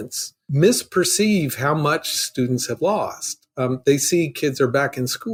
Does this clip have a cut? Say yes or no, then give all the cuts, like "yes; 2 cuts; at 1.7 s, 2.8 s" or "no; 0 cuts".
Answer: no; 0 cuts